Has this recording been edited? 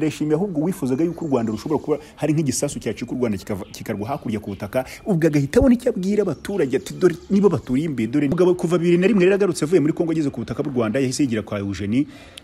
yes; 1 cut; at 8.3 s

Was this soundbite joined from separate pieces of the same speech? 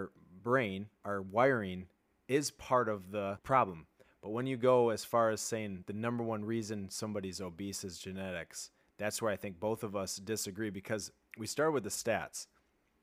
yes; 2 cuts; at 0.9 s, 3.4 s

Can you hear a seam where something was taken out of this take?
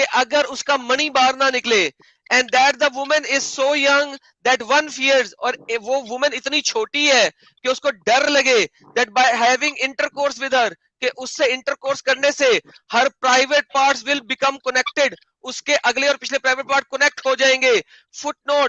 no; 0 cuts

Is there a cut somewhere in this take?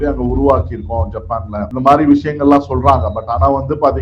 yes; 1 cut; at 1.7 s

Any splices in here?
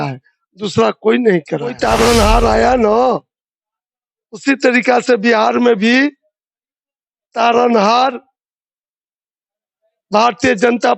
yes; 1 cut; at 1.8 s

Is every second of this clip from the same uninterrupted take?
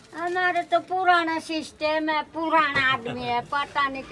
yes; 0 cuts

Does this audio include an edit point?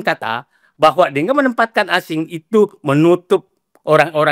no; 0 cuts

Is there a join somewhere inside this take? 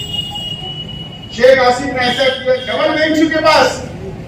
yes; 1 cut; at 2.7 s

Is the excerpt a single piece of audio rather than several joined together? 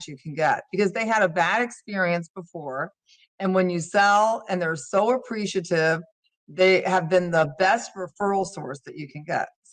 yes; 0 cuts

